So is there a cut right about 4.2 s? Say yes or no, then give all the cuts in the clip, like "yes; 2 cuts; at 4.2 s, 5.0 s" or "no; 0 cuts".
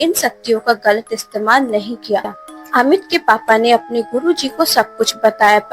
no; 1 cut; at 2.4 s